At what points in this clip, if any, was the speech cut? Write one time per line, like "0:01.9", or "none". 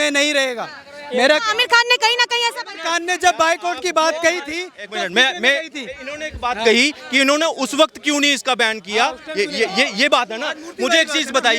none